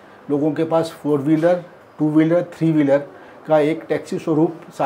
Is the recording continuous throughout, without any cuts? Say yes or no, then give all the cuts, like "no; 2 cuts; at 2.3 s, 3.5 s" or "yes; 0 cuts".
yes; 0 cuts